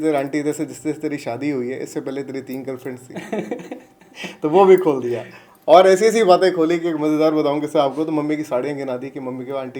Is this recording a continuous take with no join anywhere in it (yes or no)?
yes